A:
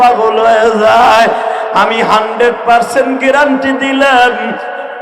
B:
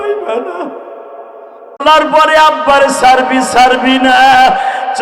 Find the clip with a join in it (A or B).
B